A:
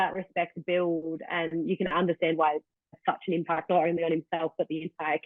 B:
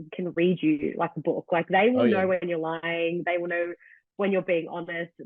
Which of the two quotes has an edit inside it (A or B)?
A